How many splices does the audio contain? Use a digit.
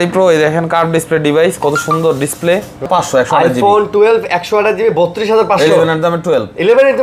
1